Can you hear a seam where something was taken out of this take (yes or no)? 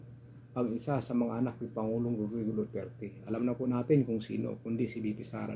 no